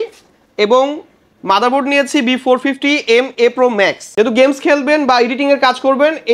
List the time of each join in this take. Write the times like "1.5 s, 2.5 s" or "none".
4.0 s